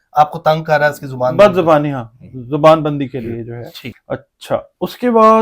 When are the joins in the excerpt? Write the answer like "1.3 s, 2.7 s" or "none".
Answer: 3.9 s